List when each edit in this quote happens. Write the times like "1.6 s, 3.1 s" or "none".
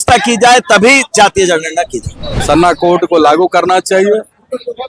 2.3 s